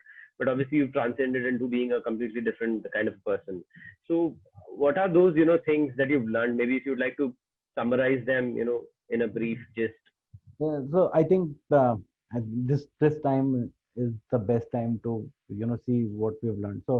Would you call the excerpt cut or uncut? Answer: uncut